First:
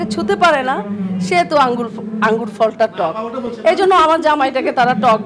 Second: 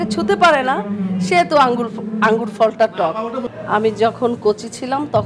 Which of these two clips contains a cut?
second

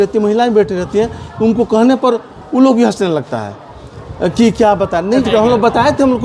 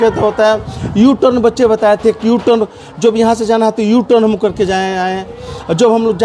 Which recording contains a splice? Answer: first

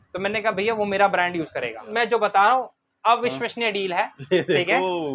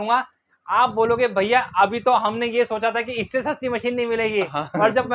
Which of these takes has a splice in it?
first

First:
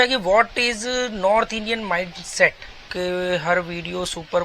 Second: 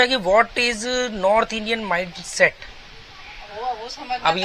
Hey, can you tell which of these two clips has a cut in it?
first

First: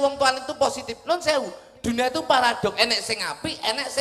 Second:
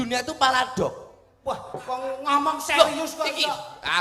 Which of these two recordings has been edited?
second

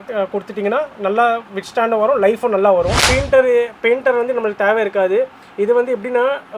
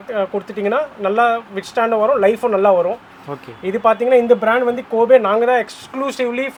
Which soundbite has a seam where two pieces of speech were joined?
first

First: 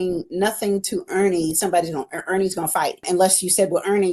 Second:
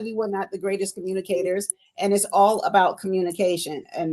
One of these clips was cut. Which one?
first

